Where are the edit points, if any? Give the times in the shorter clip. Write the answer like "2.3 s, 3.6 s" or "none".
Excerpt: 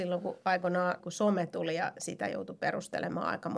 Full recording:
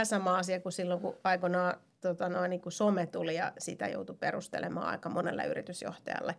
1.1 s